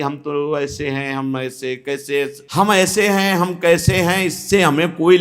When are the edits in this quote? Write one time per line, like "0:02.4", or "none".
0:02.4